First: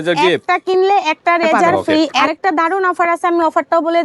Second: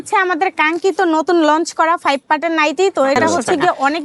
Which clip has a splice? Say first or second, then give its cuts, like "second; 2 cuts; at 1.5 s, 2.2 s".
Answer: first; 1 cut; at 2.2 s